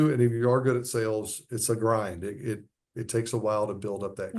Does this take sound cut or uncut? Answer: uncut